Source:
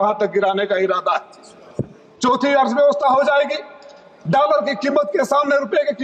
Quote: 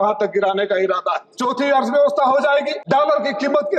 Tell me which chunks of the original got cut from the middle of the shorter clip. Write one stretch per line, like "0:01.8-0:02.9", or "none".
0:01.2-0:02.1
0:03.6-0:04.2

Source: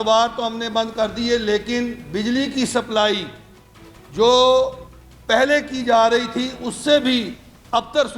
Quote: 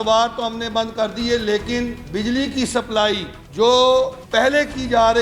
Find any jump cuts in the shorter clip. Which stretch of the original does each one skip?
0:03.4-0:04.0
0:04.8-0:05.1

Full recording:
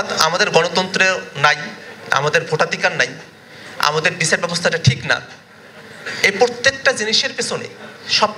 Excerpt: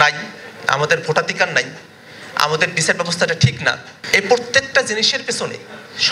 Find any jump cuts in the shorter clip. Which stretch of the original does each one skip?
0:05.4-0:06.0

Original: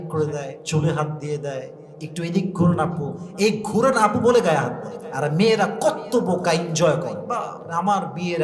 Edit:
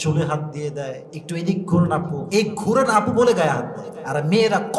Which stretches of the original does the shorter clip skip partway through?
0:01.8-0:02.0
0:03.1-0:03.3

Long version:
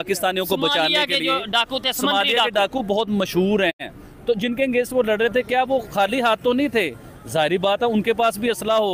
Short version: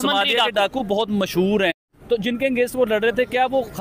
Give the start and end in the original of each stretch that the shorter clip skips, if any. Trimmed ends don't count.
0:03.9-0:04.1

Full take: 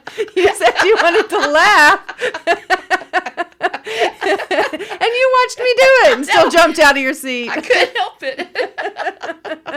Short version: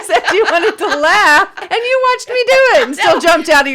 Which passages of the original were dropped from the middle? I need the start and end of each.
0:02.1-0:04.9

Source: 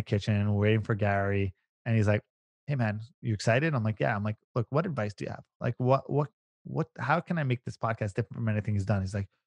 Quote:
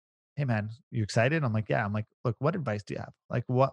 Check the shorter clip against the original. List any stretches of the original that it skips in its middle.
none

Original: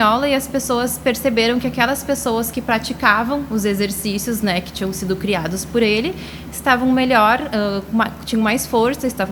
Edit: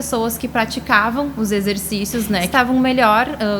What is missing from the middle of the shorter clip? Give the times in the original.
0:04.6-0:06.6

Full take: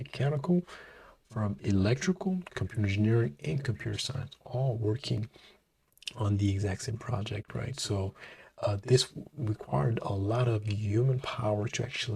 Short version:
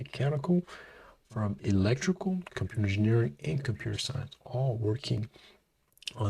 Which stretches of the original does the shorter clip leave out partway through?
none

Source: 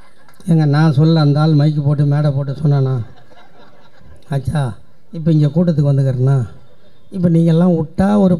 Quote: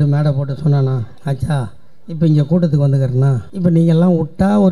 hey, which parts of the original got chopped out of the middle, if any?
0:03.1-0:04.2
0:06.5-0:07.0

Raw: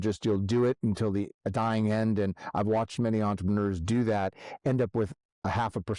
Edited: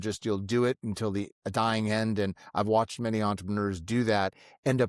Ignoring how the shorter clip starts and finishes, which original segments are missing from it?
none

